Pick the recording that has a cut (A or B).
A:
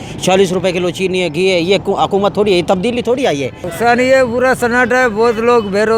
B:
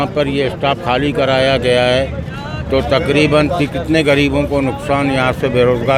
A